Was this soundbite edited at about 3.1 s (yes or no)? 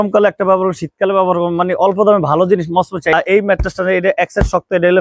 yes